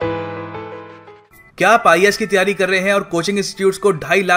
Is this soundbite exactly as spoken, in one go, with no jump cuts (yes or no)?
no